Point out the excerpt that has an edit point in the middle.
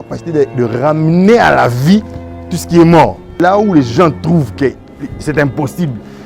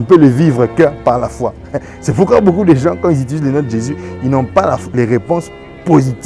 first; 1 cut; at 3.3 s

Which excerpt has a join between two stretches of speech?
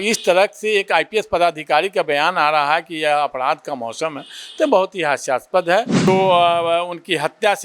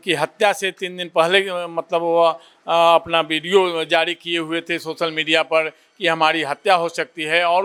first; 1 cut; at 6.1 s

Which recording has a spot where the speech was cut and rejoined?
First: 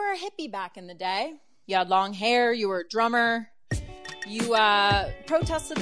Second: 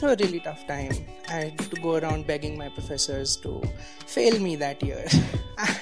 first; 1 cut; at 1.5 s

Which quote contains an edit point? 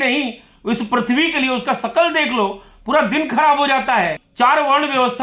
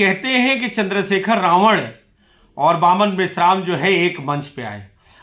first; 1 cut; at 4.2 s

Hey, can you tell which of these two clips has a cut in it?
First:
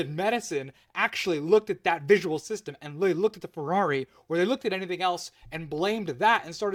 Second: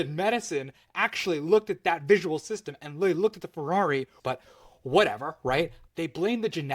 second; 2 cuts; at 4.1 s, 5.8 s

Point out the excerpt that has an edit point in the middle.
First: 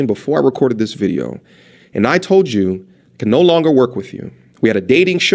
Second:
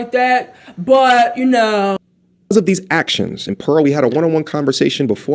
second; 1 cut; at 2.0 s

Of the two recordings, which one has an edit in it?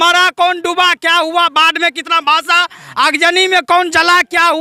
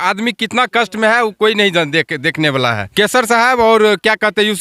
second; 1 cut; at 2.8 s

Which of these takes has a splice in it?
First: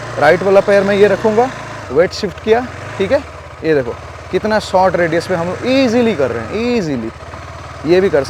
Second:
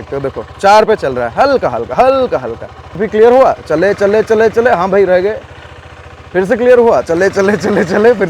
second; 1 cut; at 3.0 s

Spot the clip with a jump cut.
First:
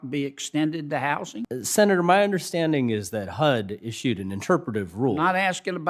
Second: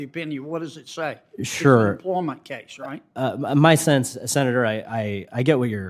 first; 1 cut; at 1.4 s

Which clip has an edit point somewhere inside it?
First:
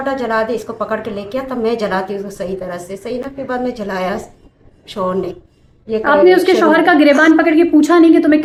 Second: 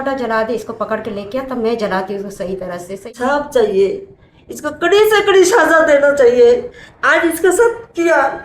second; 1 cut; at 3.1 s

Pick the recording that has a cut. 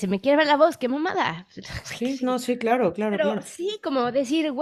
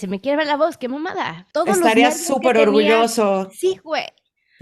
second; 1 cut; at 1.4 s

